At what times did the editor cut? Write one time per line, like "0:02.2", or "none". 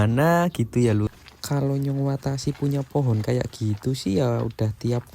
0:01.1